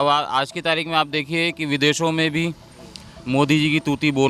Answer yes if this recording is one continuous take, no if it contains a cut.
yes